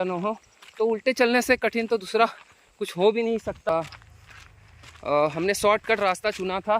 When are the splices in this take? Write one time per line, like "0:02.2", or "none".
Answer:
0:03.7